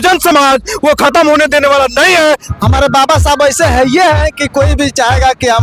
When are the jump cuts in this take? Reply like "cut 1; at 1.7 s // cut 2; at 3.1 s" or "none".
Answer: cut 1; at 2.5 s